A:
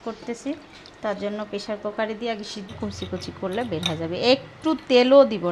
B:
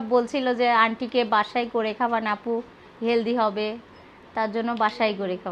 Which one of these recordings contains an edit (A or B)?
A